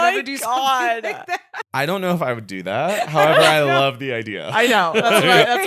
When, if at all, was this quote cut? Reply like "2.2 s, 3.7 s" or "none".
1.6 s